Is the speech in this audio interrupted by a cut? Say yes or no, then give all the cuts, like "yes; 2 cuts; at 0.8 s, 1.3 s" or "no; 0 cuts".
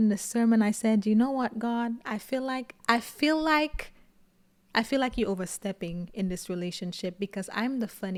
no; 0 cuts